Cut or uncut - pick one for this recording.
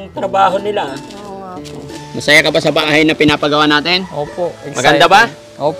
cut